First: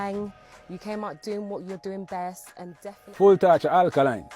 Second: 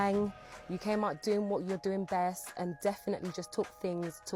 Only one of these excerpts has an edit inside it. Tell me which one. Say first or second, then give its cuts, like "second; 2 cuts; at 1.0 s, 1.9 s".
first; 1 cut; at 2.8 s